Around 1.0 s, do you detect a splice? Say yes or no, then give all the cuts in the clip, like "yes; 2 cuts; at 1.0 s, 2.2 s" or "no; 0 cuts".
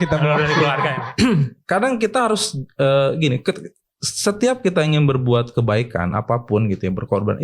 yes; 1 cut; at 1.0 s